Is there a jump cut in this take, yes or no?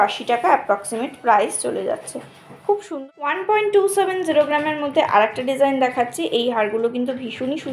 yes